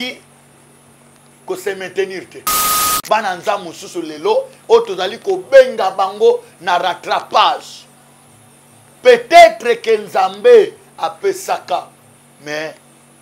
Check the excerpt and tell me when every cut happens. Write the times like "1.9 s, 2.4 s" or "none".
2.8 s